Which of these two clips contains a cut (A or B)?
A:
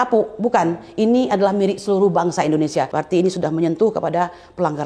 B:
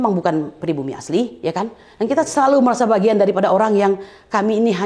A